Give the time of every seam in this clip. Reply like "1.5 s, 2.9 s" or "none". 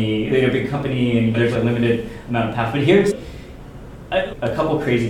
none